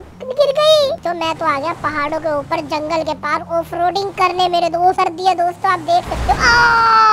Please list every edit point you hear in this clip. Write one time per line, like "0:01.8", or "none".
0:01.0
0:05.0